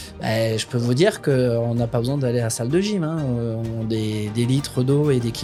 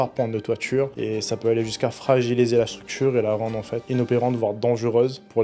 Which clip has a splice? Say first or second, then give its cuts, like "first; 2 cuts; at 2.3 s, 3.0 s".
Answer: second; 2 cuts; at 0.9 s, 3.8 s